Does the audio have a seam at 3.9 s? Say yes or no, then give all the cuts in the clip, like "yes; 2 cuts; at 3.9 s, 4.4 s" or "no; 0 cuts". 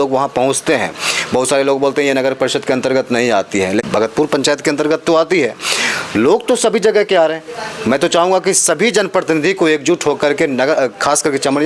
yes; 1 cut; at 3.9 s